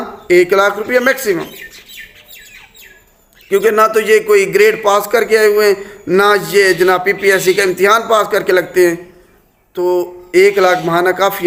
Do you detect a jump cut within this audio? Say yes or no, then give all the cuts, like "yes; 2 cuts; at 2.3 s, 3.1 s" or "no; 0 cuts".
no; 0 cuts